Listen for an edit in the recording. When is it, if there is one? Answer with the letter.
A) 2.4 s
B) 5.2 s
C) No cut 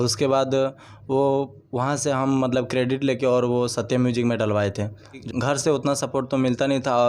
B